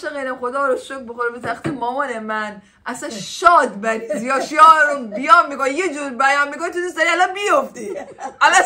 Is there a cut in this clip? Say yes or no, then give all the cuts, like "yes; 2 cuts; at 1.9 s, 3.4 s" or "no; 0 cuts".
no; 0 cuts